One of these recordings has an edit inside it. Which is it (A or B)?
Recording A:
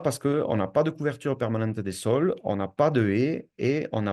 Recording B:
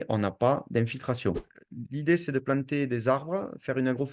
B